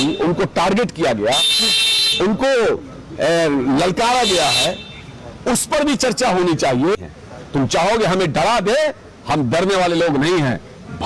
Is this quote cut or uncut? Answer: cut